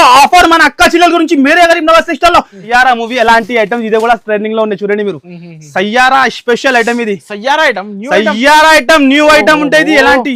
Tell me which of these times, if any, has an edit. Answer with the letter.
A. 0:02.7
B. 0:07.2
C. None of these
A